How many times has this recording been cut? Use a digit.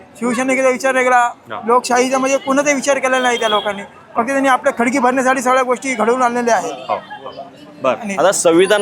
0